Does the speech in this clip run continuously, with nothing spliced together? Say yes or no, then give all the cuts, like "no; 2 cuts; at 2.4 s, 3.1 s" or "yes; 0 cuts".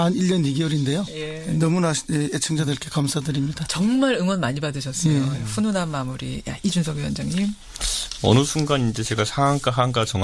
no; 1 cut; at 6.0 s